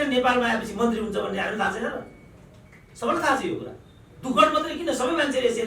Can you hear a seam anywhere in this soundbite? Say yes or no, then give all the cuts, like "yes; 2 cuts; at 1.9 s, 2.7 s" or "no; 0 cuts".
no; 0 cuts